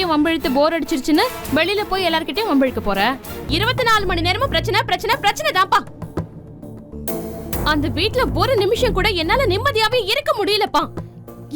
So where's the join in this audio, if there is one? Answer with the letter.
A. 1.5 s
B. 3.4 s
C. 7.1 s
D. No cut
B